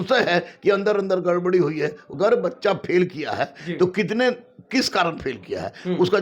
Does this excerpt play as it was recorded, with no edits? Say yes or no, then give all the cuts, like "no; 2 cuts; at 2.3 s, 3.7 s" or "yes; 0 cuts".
no; 1 cut; at 2.0 s